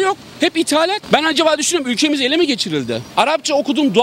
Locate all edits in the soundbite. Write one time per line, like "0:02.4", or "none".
0:01.0
0:03.0